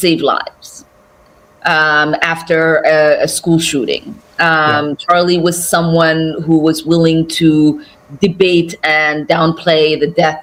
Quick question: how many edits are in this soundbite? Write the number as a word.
zero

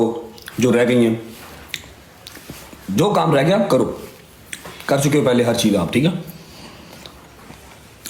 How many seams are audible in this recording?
zero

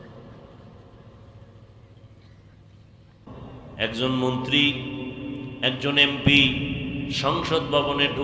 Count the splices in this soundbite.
one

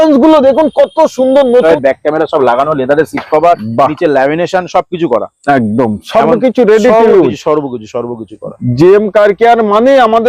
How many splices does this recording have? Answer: one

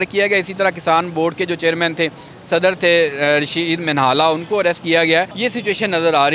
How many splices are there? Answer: one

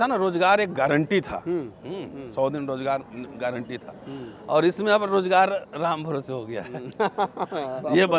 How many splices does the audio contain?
zero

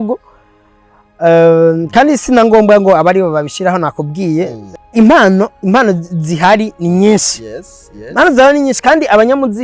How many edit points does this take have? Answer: one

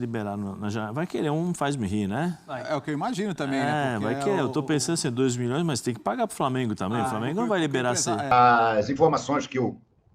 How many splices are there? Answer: one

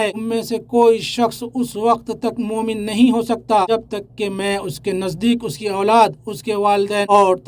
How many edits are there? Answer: zero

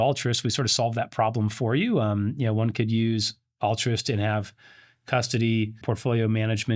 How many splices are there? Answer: one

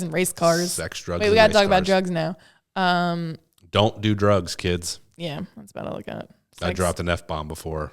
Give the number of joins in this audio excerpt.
zero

